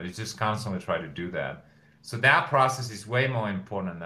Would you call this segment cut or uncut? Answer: uncut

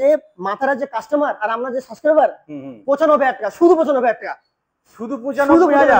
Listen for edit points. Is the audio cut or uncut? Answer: uncut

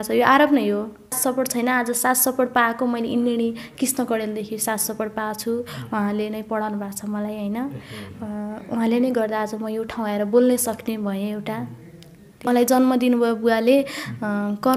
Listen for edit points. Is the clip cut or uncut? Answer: cut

